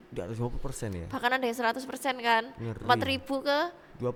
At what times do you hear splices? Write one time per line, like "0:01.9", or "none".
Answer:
none